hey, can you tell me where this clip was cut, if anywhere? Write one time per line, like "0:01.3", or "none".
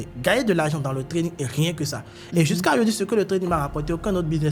none